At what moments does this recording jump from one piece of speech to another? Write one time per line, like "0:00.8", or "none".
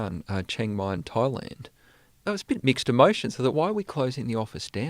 0:02.4